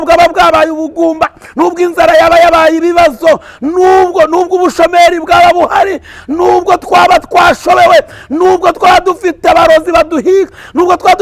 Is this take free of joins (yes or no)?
yes